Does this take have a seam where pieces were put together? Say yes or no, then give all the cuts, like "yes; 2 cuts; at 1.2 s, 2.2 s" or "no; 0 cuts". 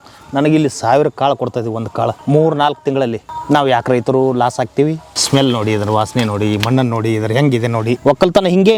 yes; 4 cuts; at 2.2 s, 3.3 s, 5.1 s, 8.0 s